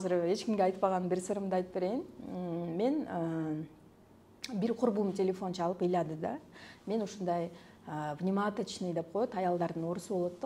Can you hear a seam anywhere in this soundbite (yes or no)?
no